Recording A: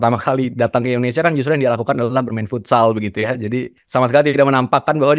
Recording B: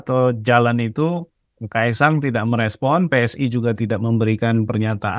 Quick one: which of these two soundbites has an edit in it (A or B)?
A